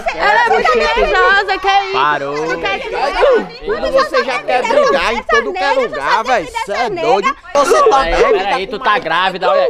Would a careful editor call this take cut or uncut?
cut